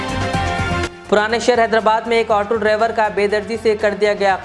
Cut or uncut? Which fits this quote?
uncut